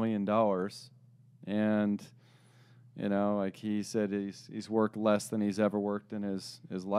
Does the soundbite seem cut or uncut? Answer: uncut